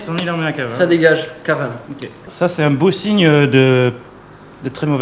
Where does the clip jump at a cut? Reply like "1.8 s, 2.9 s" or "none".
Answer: 2.2 s